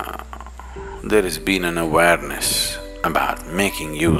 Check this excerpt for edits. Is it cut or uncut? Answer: uncut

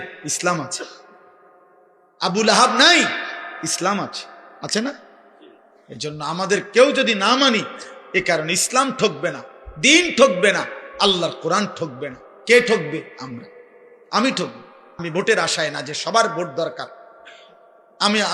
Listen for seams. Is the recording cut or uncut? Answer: cut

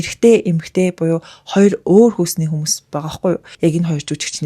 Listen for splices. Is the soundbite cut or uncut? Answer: cut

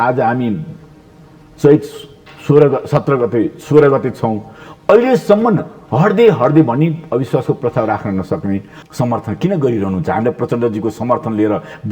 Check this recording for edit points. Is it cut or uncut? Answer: cut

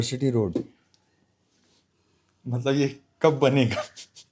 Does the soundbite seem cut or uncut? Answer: uncut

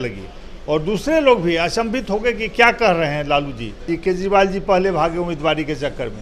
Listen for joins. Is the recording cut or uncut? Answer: cut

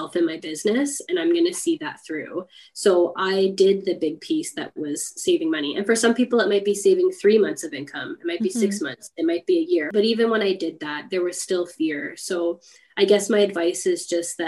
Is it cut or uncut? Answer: cut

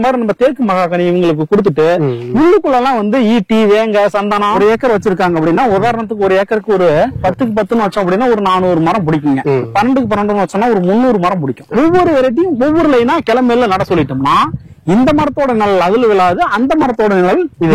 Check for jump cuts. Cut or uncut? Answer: cut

